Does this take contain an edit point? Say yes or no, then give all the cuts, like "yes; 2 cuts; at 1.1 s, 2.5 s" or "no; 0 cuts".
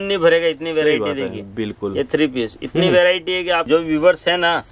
yes; 1 cut; at 3.6 s